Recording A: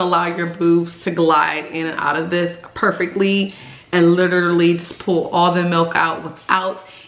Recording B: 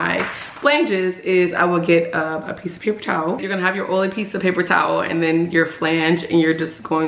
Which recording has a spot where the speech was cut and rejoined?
B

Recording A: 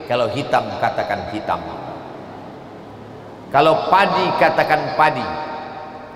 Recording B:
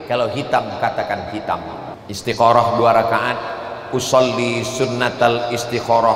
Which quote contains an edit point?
B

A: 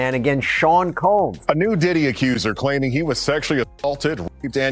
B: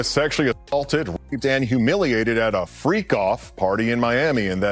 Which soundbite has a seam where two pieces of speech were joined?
A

